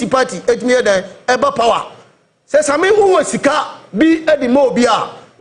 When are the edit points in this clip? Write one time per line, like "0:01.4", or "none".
none